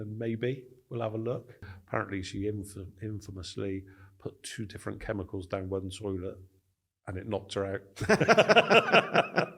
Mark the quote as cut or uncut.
cut